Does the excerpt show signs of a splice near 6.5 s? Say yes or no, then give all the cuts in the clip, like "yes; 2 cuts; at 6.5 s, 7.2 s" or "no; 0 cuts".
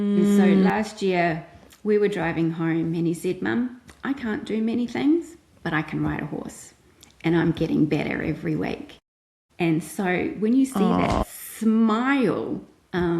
no; 0 cuts